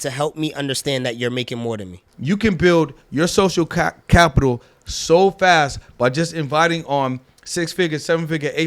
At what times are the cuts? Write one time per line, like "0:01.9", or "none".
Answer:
0:02.1

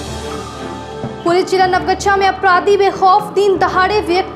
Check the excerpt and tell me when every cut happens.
0:01.0

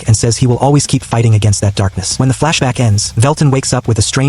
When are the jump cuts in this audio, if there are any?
0:02.0
0:03.0

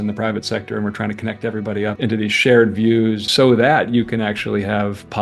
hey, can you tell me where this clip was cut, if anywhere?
0:02.0
0:03.2

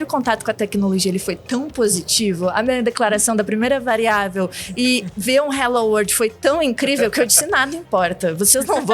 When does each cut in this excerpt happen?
none

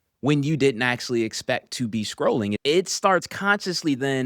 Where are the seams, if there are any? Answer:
0:02.6

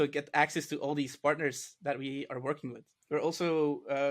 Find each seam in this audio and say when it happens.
0:02.9

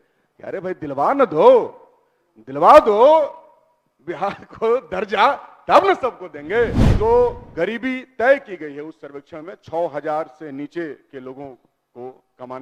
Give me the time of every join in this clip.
0:06.8

